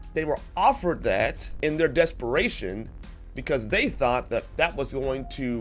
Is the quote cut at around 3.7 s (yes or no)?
no